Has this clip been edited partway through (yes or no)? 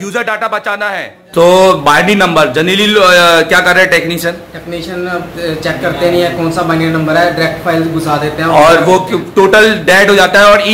yes